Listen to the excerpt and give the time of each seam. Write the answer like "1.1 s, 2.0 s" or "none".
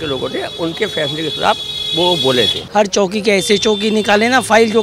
2.6 s